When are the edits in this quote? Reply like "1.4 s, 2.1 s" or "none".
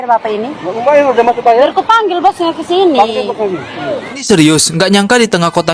4.2 s